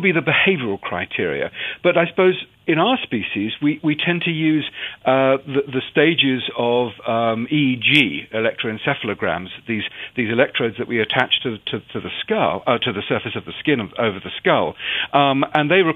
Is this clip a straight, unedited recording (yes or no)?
no